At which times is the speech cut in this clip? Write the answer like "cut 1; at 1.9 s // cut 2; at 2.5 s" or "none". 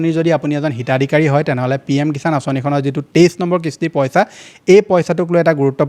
none